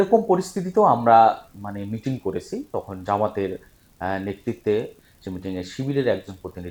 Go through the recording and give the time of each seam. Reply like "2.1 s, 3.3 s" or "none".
5.0 s

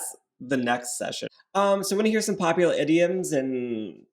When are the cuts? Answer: 1.3 s

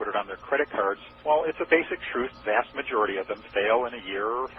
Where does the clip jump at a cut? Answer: 2.3 s

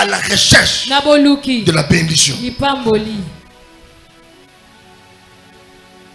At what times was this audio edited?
none

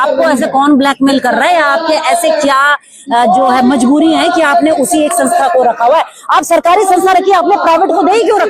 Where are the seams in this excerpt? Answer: none

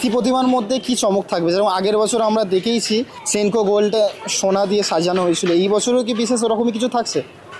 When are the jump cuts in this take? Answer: 3.2 s

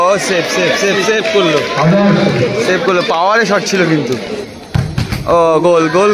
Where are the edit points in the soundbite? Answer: 4.4 s

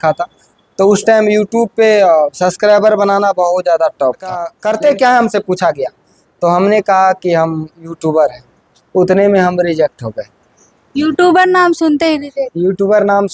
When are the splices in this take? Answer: 4.5 s

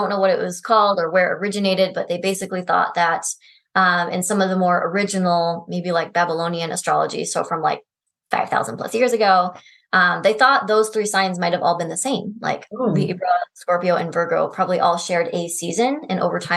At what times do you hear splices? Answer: none

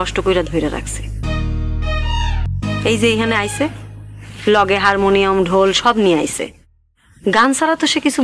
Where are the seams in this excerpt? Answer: 2.5 s

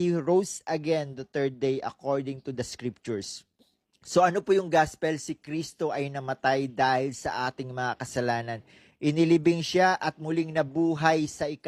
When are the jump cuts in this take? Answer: none

